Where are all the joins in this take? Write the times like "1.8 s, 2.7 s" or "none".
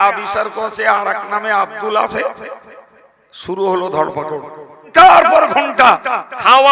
4.9 s